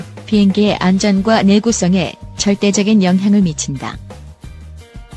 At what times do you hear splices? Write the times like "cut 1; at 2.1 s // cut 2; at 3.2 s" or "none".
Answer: none